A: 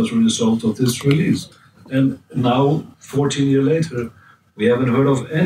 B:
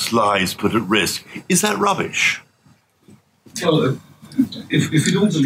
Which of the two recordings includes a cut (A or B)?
A